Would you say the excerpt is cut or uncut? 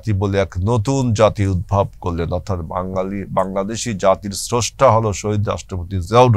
uncut